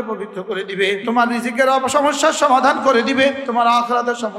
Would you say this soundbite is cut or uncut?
cut